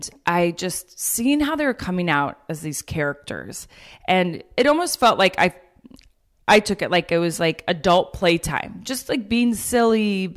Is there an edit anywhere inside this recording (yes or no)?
no